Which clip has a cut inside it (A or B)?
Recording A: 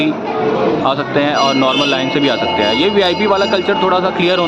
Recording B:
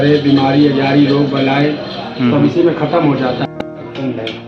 B